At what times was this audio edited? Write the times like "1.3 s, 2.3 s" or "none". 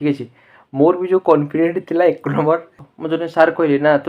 2.7 s